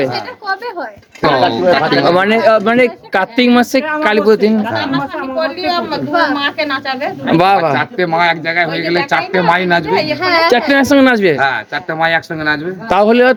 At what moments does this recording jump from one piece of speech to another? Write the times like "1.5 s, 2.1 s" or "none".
none